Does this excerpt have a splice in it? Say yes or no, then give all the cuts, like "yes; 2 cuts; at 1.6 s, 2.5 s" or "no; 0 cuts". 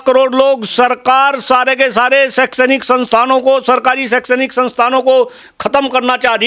no; 0 cuts